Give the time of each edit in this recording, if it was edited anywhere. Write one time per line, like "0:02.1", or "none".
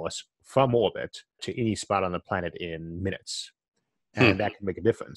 0:01.4